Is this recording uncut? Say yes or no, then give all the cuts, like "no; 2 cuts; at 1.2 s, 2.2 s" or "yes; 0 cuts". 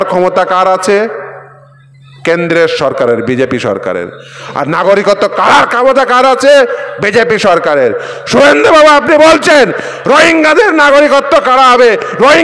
yes; 0 cuts